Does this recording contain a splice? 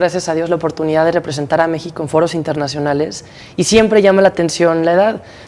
no; 0 cuts

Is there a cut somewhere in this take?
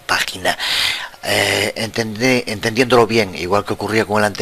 no; 0 cuts

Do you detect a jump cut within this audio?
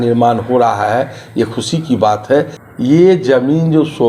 yes; 1 cut; at 2.6 s

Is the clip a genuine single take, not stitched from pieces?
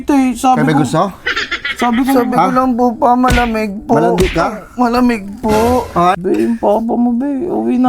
no; 1 cut; at 6.2 s

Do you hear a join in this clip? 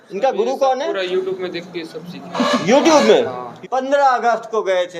yes; 1 cut; at 3.4 s

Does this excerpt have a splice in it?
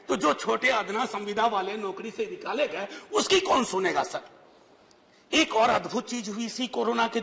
no; 0 cuts

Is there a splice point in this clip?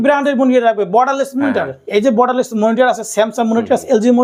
no; 0 cuts

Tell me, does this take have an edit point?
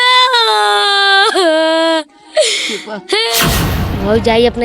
yes; 1 cut; at 3.4 s

